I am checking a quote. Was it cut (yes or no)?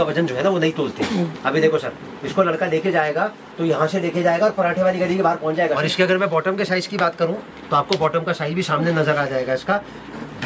yes